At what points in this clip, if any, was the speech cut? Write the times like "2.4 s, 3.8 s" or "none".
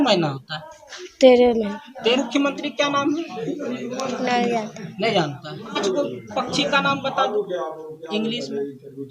2.1 s, 5.8 s